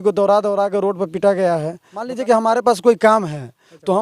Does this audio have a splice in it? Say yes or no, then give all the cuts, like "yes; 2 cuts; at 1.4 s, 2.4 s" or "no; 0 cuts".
yes; 1 cut; at 2.1 s